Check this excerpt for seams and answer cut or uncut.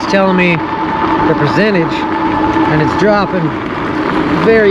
uncut